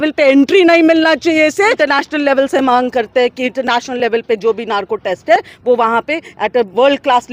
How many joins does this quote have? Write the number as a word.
one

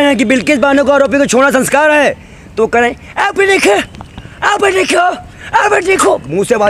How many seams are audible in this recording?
zero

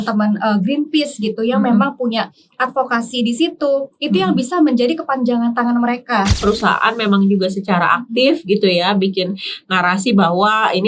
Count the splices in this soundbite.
one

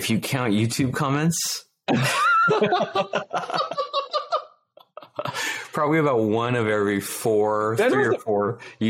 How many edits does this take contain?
zero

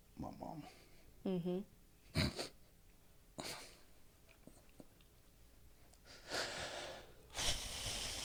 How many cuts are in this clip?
zero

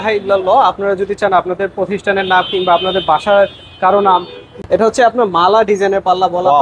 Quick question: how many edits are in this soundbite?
one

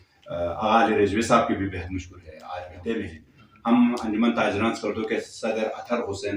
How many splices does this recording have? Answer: one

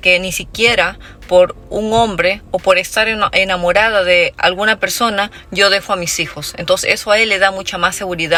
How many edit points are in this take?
zero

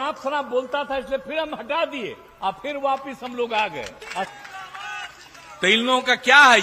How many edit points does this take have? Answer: one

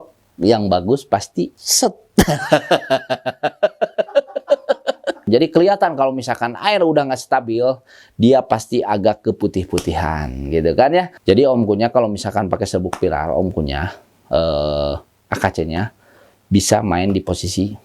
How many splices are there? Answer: two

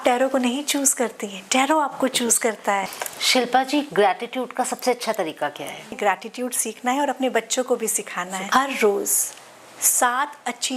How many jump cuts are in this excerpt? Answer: three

